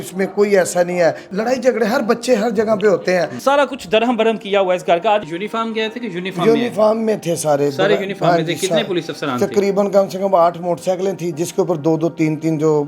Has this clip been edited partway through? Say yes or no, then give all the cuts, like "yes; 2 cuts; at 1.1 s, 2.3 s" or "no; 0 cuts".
yes; 3 cuts; at 1.2 s, 3.3 s, 5.2 s